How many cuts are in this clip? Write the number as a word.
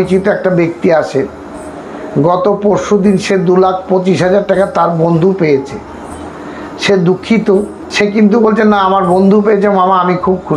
zero